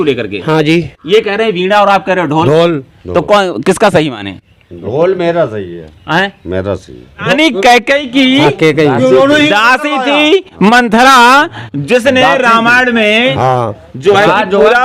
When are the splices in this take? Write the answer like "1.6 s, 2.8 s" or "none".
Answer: 6.8 s